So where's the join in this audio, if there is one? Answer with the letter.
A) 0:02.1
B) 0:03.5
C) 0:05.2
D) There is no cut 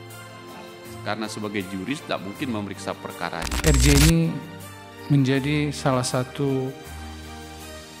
B